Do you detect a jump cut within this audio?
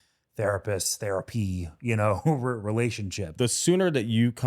yes; 1 cut; at 3.3 s

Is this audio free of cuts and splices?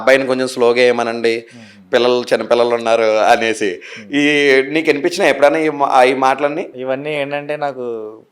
no; 1 cut; at 6.7 s

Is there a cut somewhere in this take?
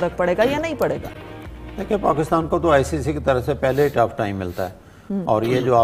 no; 0 cuts

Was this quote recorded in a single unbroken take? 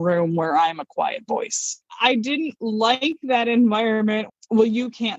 no; 2 cuts; at 1.9 s, 4.3 s

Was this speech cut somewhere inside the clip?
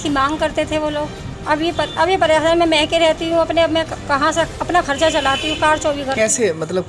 yes; 1 cut; at 1.3 s

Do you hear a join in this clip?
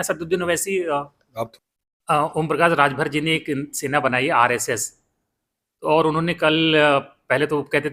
yes; 1 cut; at 1.5 s

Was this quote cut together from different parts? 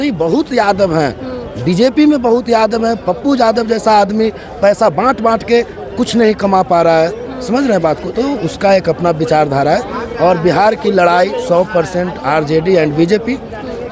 no; 0 cuts

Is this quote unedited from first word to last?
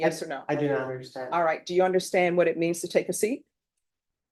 yes; 0 cuts

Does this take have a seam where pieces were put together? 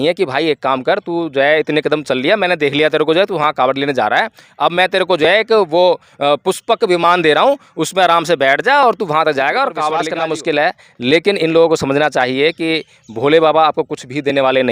yes; 1 cut; at 10.1 s

